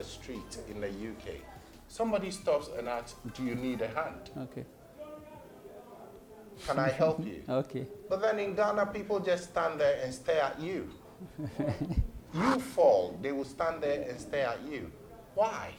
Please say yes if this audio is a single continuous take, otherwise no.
yes